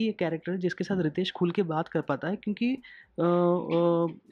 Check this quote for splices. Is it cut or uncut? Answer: uncut